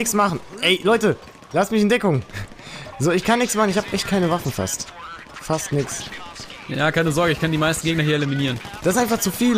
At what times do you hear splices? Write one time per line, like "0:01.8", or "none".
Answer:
0:08.7